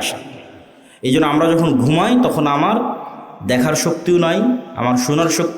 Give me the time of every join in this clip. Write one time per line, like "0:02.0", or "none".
none